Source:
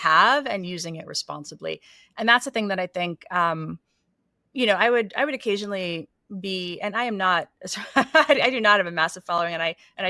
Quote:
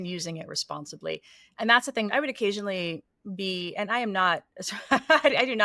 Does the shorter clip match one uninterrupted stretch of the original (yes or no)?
no